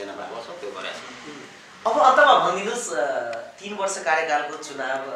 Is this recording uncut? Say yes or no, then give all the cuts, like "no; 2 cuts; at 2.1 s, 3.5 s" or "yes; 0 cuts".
yes; 0 cuts